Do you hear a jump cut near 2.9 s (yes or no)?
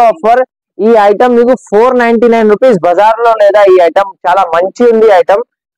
no